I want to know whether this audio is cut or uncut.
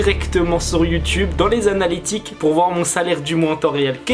uncut